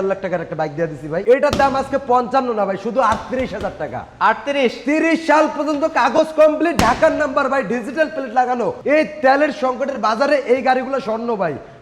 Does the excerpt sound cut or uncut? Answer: cut